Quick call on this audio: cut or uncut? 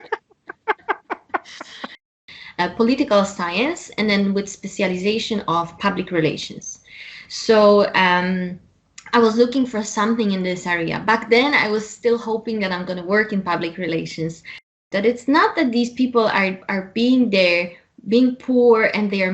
cut